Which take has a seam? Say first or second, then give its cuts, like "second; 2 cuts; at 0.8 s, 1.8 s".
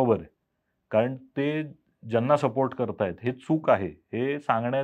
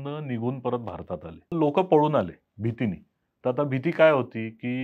second; 1 cut; at 1.5 s